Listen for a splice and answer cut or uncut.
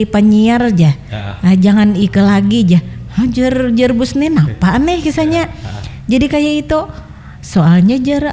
uncut